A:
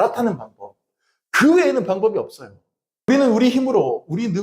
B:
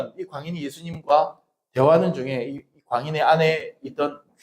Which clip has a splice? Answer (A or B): A